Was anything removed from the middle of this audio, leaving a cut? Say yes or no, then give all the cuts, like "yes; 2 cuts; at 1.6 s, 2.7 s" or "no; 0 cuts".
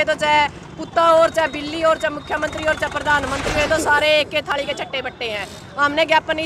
no; 0 cuts